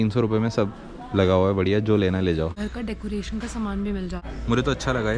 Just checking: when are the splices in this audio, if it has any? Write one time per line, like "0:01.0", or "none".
0:02.6
0:04.3